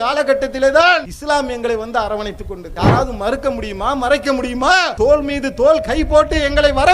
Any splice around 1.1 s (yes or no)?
yes